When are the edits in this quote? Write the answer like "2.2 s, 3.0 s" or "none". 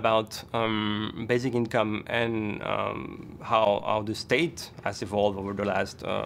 none